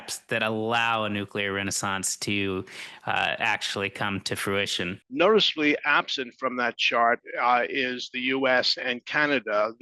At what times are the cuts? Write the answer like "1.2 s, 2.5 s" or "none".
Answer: 5.0 s